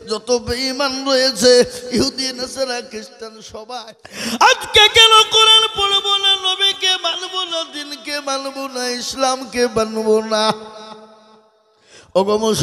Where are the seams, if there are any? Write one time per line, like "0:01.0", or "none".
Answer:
0:03.5